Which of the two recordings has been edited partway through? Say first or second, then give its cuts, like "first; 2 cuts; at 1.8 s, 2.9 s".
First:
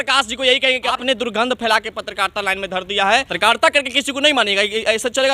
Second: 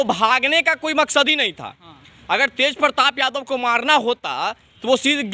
first; 2 cuts; at 1.0 s, 3.3 s